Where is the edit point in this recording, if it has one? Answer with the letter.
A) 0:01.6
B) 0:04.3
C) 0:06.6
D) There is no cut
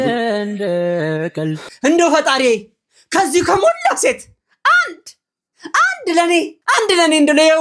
A